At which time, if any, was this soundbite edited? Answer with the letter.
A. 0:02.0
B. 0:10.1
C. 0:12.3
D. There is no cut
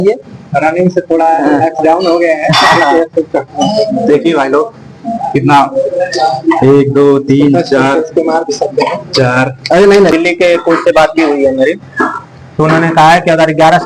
B